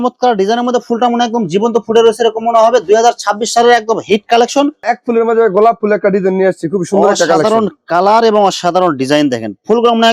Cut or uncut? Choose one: cut